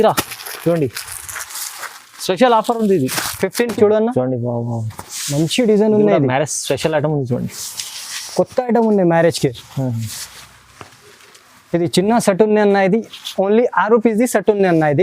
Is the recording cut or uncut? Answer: cut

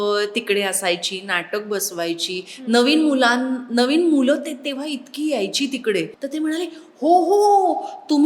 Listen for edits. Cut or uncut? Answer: cut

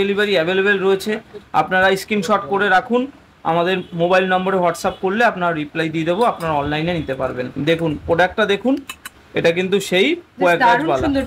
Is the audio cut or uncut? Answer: uncut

